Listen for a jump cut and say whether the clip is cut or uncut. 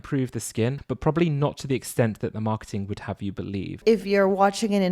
cut